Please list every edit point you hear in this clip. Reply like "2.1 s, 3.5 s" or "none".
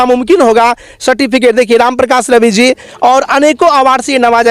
none